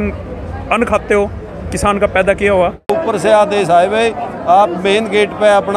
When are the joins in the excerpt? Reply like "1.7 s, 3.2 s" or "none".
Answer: 2.9 s